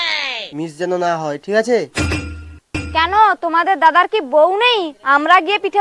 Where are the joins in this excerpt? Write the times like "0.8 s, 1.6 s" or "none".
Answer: 2.7 s